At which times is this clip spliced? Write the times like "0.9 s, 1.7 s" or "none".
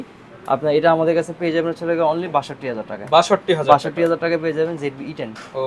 none